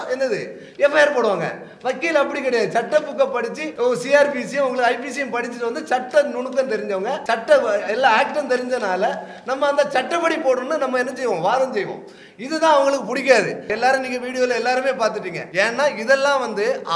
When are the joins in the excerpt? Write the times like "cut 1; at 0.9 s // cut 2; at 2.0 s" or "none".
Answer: cut 1; at 3.6 s // cut 2; at 7.2 s // cut 3; at 13.7 s // cut 4; at 15.4 s